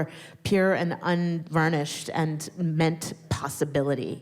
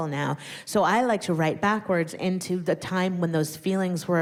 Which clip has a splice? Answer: first; 1 cut; at 3.3 s

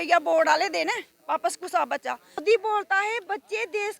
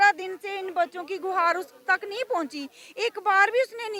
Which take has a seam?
first; 1 cut; at 2.4 s

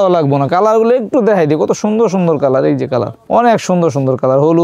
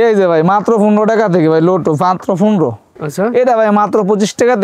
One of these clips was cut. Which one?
second; 1 cut; at 3.0 s

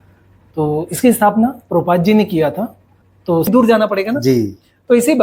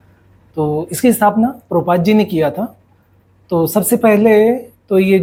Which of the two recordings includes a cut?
first; 1 cut; at 3.5 s

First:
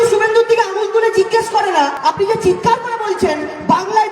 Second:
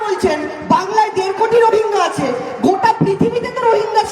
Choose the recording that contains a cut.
first; 1 cut; at 2.0 s

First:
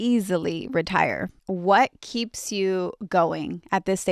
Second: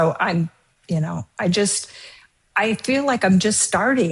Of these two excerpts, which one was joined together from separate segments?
first; 1 cut; at 1.3 s

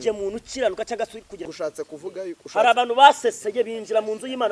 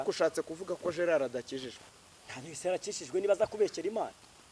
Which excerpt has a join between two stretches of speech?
first; 1 cut; at 1.4 s

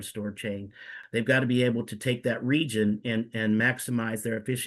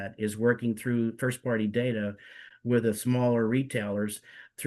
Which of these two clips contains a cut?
first; 1 cut; at 0.9 s

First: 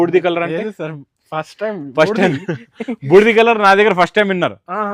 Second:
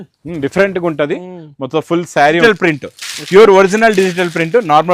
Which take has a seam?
second; 1 cut; at 2.4 s

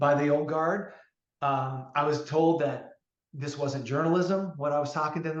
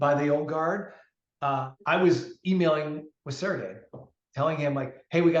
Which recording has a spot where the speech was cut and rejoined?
second; 1 cut; at 1.7 s

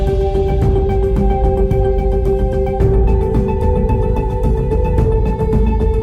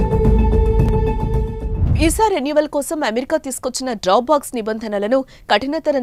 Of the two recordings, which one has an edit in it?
first; 1 cut; at 4.3 s

